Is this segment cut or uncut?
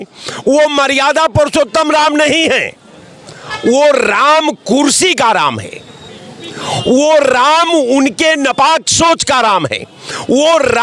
uncut